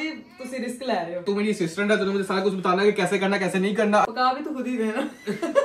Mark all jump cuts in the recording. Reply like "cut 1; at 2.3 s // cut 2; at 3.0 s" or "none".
cut 1; at 1.2 s // cut 2; at 4.1 s